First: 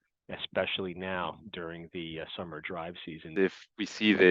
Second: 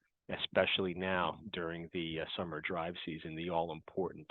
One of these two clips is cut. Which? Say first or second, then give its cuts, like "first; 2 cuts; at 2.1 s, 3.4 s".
first; 1 cut; at 3.3 s